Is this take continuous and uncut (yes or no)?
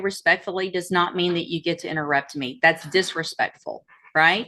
yes